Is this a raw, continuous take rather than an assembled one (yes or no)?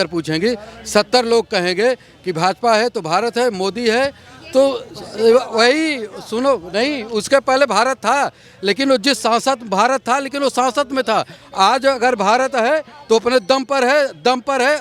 yes